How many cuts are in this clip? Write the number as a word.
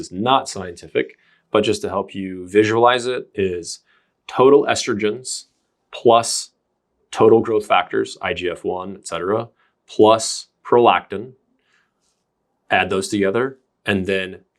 zero